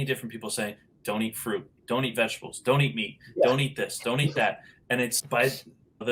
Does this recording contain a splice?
no; 0 cuts

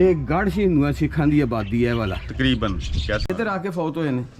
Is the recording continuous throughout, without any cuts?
no; 1 cut; at 3.2 s

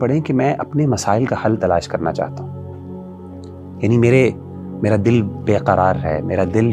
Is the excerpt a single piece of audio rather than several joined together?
yes; 0 cuts

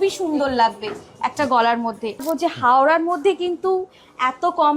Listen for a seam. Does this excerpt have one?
yes; 1 cut; at 2.2 s

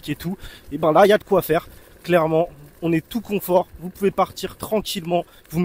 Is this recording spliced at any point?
no; 0 cuts

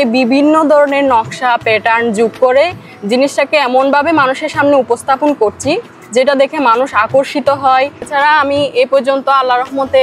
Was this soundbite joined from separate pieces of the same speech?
yes; 1 cut; at 8.1 s

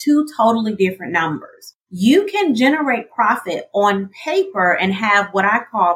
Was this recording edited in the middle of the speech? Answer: yes; 1 cut; at 1.7 s

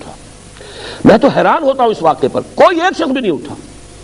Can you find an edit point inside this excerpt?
no; 0 cuts

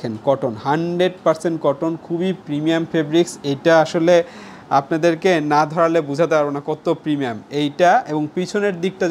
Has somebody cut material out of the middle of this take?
no; 0 cuts

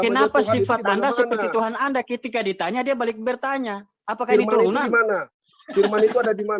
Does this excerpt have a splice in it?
no; 0 cuts

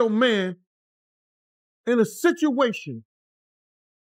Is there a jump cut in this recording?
no; 0 cuts

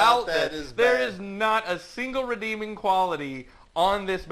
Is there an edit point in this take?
no; 0 cuts

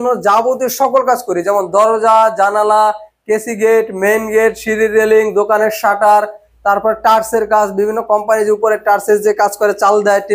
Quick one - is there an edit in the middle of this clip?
no; 0 cuts

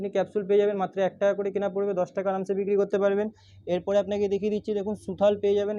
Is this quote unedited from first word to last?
yes; 0 cuts

